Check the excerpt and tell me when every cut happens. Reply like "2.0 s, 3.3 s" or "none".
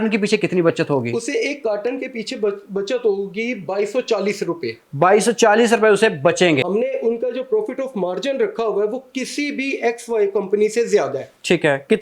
6.6 s